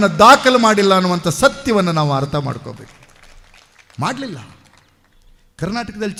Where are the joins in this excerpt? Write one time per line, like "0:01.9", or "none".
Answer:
none